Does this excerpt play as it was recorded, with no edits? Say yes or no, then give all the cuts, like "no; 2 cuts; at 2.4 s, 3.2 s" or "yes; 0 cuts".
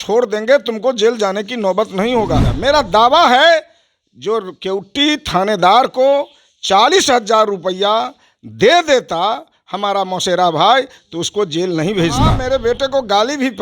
no; 2 cuts; at 2.5 s, 12.4 s